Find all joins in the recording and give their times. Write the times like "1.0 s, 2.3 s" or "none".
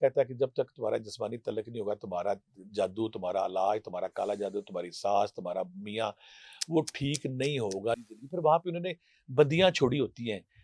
8.1 s